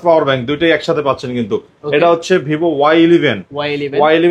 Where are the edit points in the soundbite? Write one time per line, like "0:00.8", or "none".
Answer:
none